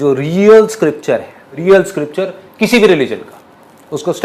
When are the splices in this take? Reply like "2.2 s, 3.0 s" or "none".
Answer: 1.5 s